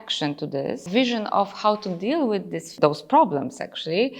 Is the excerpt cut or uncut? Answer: cut